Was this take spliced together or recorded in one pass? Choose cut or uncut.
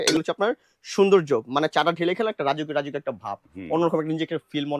uncut